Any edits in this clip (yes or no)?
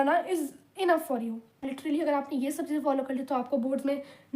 yes